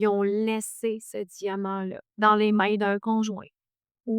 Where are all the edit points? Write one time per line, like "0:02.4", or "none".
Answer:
0:02.1